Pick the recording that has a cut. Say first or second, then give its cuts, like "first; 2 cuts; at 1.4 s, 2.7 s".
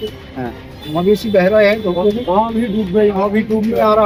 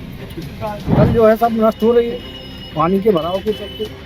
second; 1 cut; at 1.0 s